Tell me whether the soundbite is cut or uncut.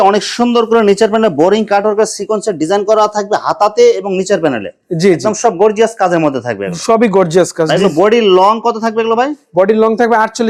uncut